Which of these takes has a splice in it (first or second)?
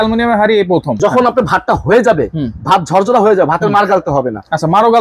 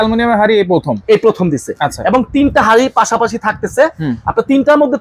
first